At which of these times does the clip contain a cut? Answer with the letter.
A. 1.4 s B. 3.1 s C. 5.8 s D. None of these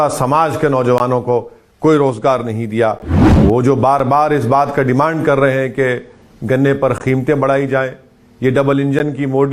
B